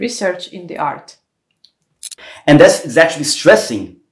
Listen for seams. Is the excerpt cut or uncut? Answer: cut